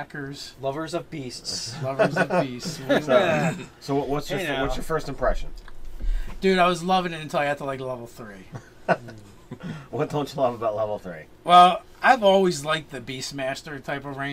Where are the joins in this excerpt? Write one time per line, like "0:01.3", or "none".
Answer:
0:10.6